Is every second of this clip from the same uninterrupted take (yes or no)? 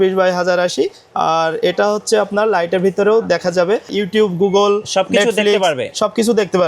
no